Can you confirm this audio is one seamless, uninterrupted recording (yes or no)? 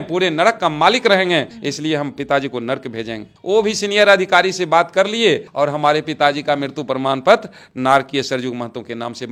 yes